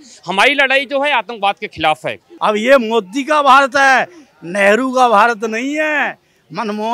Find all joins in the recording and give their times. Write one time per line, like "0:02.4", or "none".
0:02.2